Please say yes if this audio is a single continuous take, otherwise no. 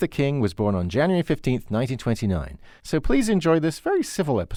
yes